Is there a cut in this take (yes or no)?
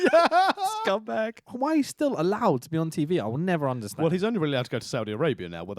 yes